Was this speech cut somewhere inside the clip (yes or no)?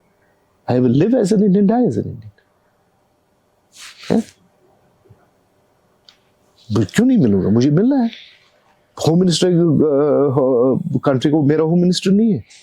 no